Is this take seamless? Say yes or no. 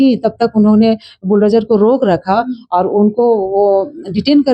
yes